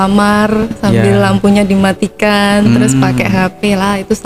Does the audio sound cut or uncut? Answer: uncut